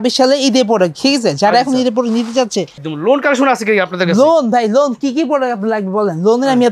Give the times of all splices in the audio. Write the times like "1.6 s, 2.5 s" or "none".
2.8 s